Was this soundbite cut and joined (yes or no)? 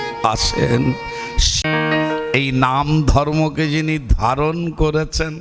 yes